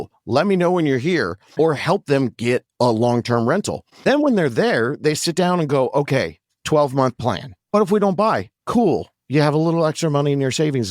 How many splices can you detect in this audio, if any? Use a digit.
3